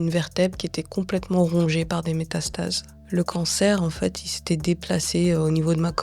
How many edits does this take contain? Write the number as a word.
one